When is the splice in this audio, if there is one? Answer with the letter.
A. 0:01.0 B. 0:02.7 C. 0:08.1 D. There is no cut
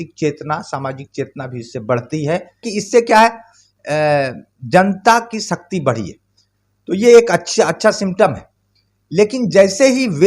B